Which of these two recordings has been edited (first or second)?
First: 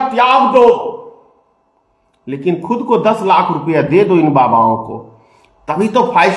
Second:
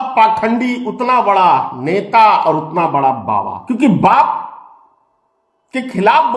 second